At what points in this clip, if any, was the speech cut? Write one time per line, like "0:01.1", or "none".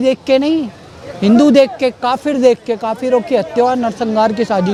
none